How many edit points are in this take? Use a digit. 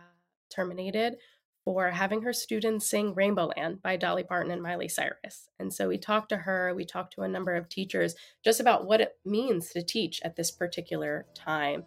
0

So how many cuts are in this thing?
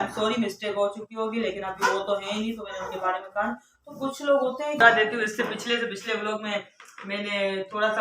1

